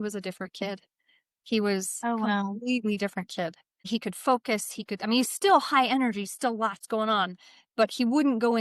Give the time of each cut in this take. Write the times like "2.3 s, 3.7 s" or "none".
3.7 s